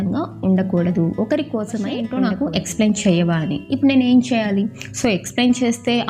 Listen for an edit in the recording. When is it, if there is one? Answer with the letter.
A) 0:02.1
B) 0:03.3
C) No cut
A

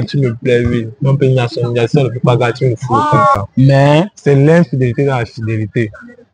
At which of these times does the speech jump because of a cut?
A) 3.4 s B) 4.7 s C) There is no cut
A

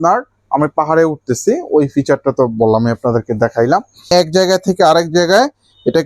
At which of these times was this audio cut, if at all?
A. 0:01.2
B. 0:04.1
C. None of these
B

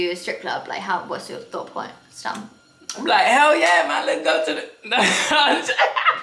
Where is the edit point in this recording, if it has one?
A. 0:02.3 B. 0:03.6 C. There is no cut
C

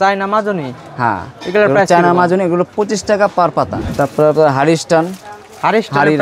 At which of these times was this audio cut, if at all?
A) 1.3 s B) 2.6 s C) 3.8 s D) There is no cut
C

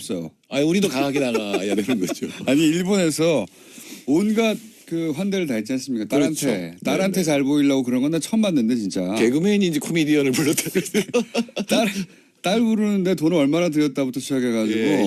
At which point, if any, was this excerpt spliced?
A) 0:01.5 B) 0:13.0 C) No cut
B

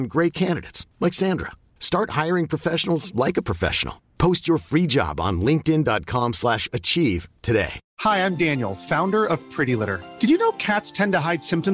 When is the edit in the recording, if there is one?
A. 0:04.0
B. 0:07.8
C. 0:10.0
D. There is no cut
B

